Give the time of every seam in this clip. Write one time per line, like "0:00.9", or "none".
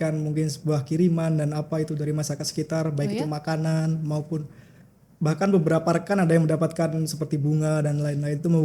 none